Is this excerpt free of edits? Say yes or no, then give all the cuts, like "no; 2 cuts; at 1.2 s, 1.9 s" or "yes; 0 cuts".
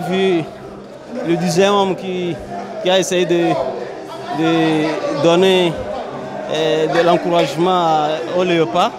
yes; 0 cuts